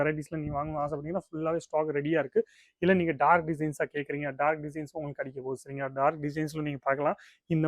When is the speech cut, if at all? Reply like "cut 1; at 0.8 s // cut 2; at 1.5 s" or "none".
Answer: cut 1; at 2.6 s